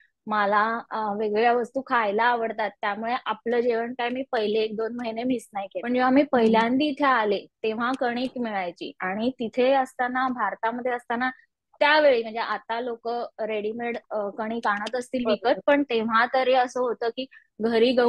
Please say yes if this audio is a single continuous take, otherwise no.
no